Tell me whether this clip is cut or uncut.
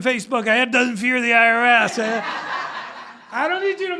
uncut